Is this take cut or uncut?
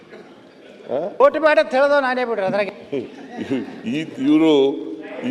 uncut